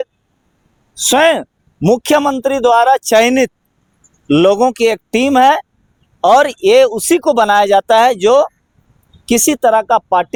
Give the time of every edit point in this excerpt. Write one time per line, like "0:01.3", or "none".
none